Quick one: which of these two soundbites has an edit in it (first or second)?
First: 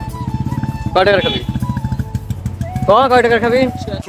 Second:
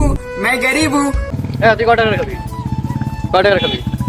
second